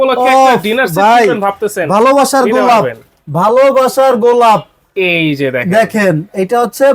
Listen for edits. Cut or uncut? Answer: uncut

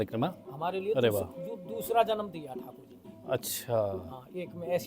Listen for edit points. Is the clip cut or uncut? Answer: uncut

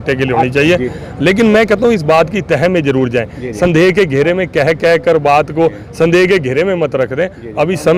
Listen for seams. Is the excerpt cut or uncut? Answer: uncut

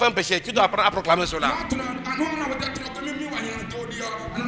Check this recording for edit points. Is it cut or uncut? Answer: uncut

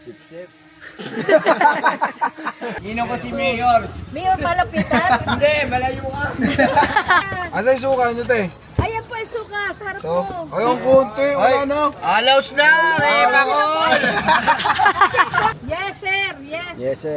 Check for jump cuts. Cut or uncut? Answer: cut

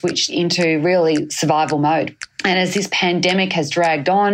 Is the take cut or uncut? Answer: cut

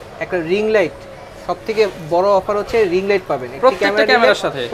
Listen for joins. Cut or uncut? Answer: uncut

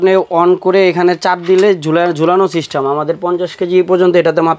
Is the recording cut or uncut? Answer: uncut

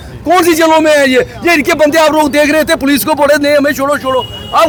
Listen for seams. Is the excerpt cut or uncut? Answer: uncut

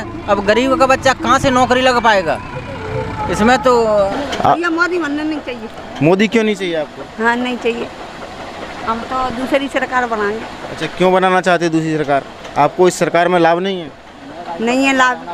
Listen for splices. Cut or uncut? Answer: cut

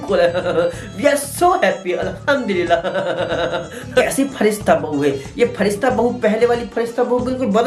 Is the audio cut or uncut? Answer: cut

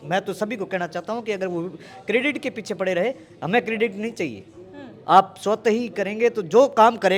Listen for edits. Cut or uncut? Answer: uncut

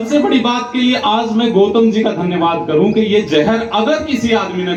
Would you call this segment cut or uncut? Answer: uncut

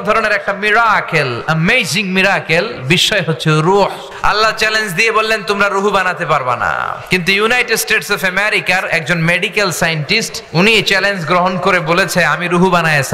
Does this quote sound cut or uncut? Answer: cut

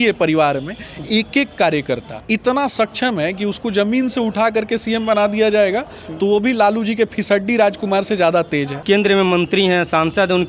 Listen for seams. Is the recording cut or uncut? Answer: cut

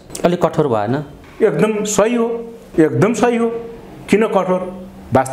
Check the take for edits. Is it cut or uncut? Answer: uncut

